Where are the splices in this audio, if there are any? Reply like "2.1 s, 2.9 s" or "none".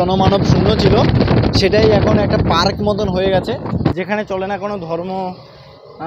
3.9 s